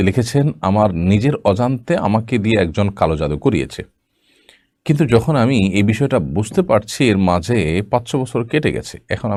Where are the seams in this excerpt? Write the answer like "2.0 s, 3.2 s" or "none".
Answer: none